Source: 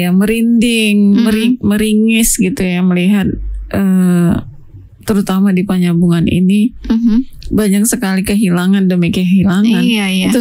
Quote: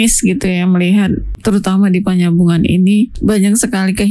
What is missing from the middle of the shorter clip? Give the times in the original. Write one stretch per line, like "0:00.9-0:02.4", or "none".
0:03.4-0:04.9
0:06.8-0:07.4